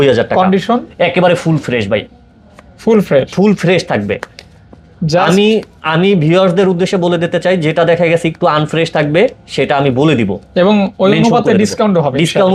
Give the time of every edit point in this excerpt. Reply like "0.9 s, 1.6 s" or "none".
none